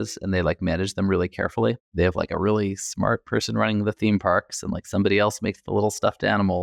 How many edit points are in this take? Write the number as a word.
zero